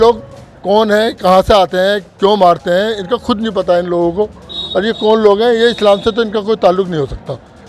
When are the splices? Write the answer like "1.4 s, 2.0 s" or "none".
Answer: none